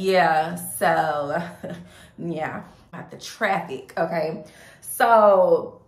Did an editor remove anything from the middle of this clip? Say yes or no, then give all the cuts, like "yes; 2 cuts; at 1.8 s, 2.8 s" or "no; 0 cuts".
yes; 1 cut; at 2.9 s